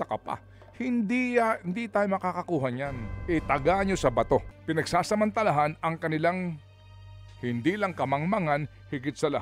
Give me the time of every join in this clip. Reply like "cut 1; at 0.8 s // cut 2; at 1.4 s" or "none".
cut 1; at 4.6 s